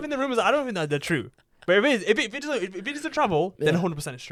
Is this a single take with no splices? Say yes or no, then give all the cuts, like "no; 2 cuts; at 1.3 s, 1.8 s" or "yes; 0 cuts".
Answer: yes; 0 cuts